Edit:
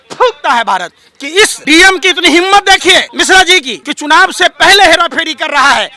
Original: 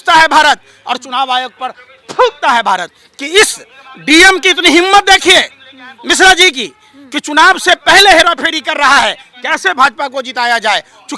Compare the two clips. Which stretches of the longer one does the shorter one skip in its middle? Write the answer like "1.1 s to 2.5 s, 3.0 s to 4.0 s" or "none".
3.6 s to 4.0 s, 5.9 s to 6.7 s